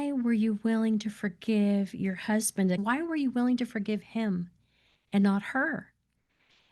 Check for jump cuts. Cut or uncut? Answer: cut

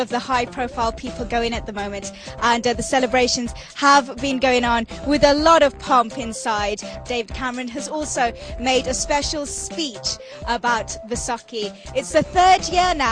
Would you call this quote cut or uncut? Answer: uncut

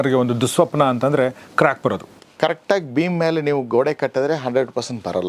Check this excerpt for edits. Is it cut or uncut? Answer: cut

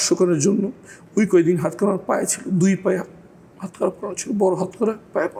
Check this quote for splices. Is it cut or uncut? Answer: uncut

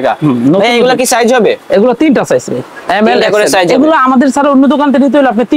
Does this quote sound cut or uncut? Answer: uncut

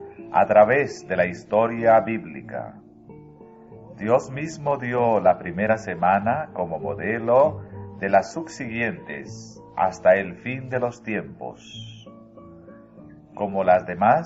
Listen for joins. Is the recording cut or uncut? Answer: cut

